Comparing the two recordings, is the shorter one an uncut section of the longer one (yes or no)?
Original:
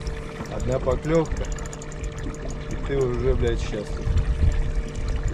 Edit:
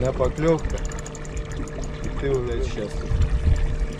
no